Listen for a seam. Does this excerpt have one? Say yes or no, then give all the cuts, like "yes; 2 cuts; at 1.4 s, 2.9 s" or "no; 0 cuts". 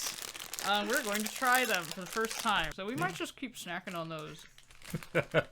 yes; 1 cut; at 2.7 s